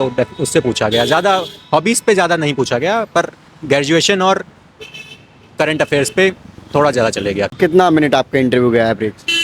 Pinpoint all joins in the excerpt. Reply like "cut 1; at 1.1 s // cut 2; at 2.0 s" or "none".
cut 1; at 7.5 s